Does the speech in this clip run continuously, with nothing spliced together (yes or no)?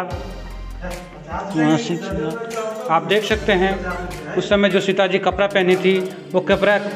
yes